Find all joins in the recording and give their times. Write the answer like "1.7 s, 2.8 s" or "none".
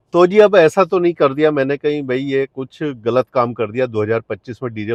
none